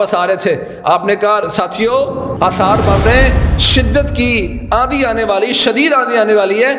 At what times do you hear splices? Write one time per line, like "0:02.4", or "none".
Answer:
0:01.5
0:02.3